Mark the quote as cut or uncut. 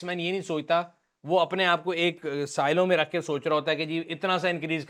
uncut